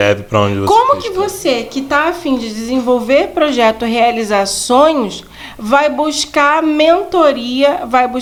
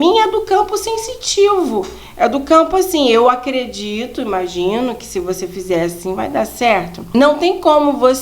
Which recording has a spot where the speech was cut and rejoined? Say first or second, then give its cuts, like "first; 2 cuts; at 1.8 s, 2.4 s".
second; 1 cut; at 7.1 s